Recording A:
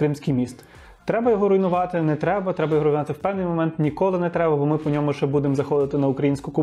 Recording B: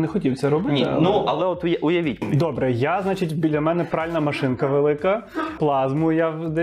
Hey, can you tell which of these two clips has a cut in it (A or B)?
B